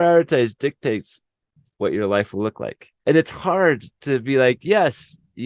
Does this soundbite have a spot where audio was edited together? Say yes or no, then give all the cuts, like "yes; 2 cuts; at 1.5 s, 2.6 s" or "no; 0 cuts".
no; 0 cuts